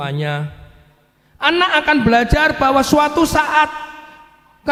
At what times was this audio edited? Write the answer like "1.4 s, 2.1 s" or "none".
none